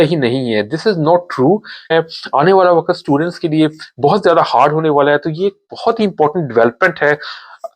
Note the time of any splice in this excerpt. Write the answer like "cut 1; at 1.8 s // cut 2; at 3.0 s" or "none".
cut 1; at 1.9 s

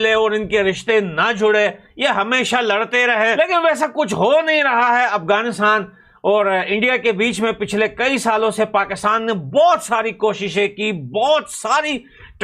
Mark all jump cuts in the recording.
cut 1; at 3.3 s

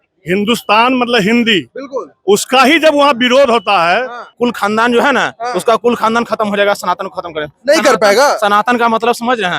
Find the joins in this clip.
cut 1; at 4.3 s

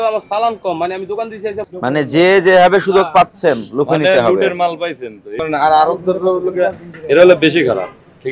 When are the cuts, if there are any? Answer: cut 1; at 1.6 s

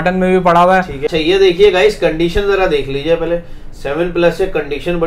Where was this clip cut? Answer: cut 1; at 1.0 s

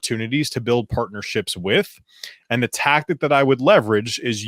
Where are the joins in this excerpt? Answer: none

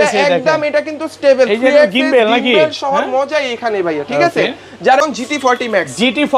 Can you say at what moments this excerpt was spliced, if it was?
cut 1; at 5.0 s

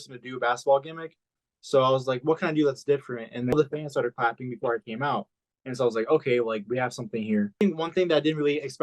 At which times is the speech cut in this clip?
cut 1; at 3.5 s // cut 2; at 7.6 s

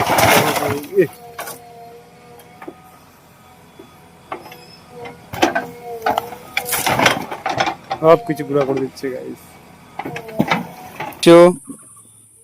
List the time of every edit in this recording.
cut 1; at 11.1 s

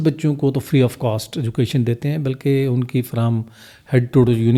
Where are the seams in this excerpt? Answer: none

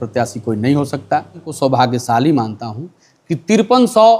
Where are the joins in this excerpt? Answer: cut 1; at 1.5 s

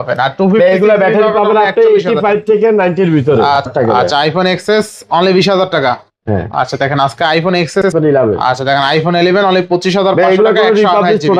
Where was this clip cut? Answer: cut 1; at 3.7 s // cut 2; at 7.9 s

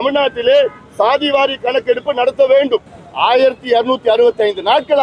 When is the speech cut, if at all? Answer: cut 1; at 3.0 s

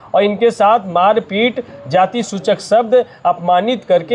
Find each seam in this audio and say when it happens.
none

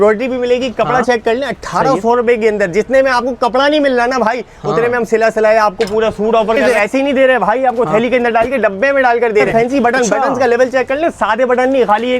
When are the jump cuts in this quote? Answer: cut 1; at 6.6 s // cut 2; at 9.5 s

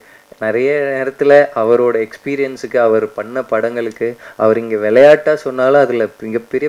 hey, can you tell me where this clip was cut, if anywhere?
none

